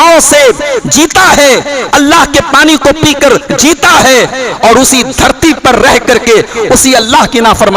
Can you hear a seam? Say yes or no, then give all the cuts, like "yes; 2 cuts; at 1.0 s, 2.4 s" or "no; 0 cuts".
no; 0 cuts